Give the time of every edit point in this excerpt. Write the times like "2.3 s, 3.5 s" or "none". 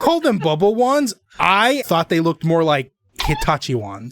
1.8 s